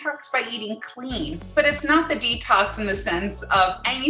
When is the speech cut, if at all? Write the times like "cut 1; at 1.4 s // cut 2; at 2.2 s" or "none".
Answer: cut 1; at 1.4 s